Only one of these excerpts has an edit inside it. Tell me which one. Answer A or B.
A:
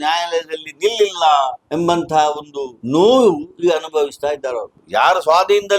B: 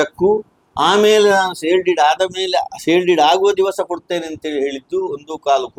A